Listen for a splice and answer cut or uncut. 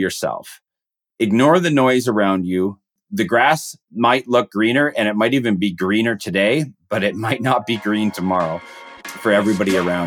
cut